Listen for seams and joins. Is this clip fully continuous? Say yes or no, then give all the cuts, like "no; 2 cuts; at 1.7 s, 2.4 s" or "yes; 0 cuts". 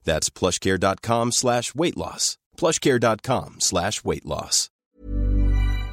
no; 1 cut; at 5.0 s